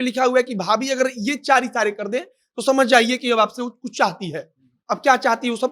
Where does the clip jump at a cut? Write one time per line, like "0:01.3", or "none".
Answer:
none